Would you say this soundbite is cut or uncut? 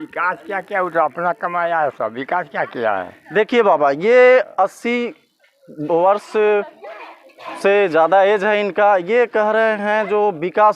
uncut